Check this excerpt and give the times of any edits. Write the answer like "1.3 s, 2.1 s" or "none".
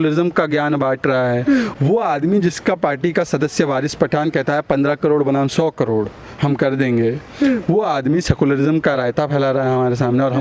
none